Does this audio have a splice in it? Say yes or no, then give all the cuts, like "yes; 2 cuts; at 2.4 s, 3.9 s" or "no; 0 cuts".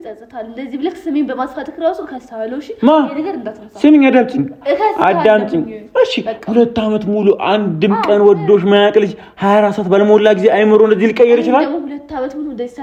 no; 0 cuts